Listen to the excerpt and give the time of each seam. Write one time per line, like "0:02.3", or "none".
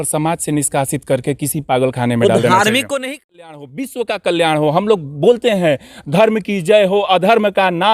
0:03.1